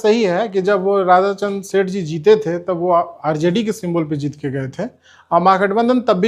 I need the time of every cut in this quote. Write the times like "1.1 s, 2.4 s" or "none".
none